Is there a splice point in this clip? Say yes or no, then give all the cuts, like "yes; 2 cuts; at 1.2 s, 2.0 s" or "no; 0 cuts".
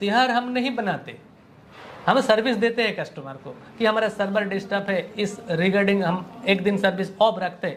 no; 0 cuts